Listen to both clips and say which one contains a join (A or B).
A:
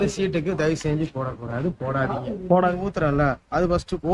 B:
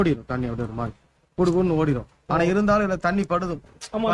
A